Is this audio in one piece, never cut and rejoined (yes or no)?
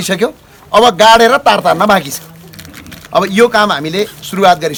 yes